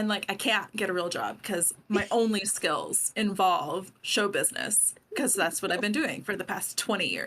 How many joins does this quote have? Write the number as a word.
zero